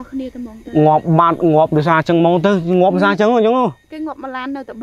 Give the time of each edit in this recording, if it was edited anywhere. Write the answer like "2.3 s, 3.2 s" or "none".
none